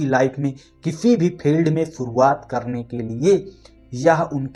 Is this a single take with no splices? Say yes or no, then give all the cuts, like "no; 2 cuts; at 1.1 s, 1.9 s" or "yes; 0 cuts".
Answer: yes; 0 cuts